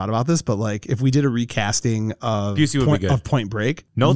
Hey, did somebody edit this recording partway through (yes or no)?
no